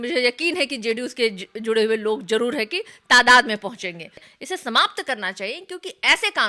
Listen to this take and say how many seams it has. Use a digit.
1